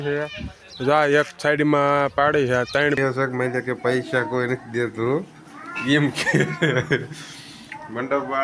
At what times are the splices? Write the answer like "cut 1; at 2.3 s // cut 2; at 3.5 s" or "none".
cut 1; at 3.0 s